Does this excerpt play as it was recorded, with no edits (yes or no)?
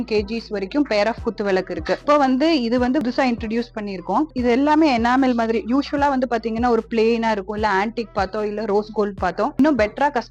yes